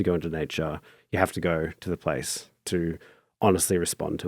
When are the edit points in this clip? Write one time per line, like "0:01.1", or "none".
0:01.0